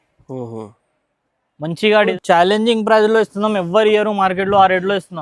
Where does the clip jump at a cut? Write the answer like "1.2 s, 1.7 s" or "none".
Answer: 2.1 s